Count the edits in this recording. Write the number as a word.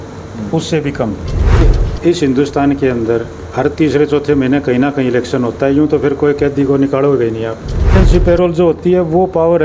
two